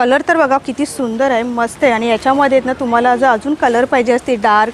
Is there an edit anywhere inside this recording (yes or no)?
no